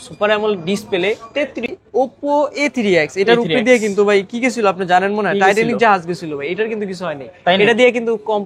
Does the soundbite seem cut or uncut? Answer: cut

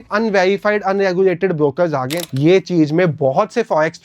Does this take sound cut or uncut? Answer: cut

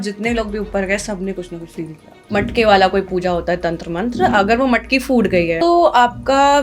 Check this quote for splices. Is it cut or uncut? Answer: cut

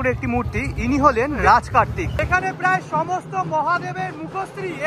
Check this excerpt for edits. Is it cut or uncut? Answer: cut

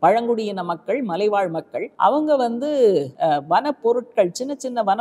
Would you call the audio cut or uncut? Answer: cut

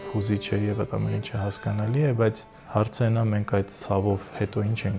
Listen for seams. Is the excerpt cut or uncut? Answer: cut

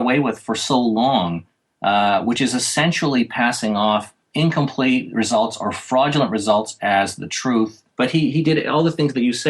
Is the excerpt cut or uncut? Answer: cut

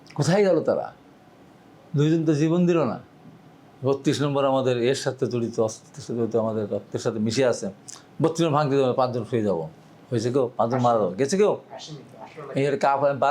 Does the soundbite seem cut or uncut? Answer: uncut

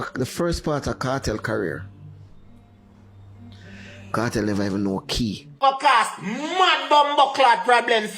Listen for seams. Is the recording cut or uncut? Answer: cut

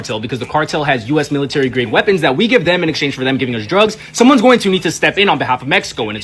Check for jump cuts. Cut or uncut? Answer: cut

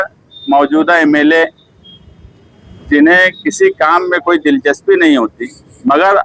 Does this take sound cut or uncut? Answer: uncut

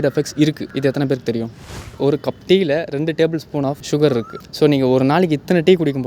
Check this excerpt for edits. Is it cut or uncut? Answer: cut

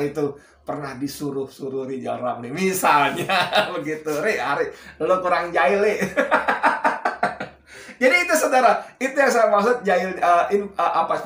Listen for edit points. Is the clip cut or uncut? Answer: uncut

